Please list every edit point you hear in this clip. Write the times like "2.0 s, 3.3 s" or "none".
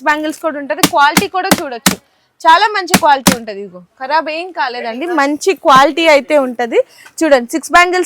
none